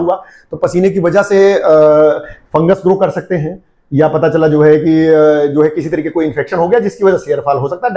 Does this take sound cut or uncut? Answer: uncut